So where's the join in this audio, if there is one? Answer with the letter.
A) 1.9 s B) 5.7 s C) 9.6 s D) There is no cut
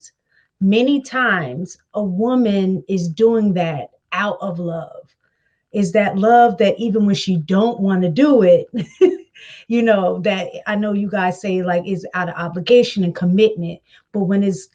D